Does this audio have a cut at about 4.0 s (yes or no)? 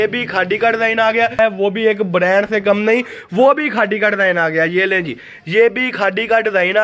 no